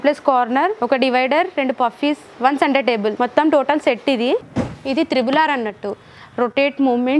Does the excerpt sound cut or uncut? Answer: cut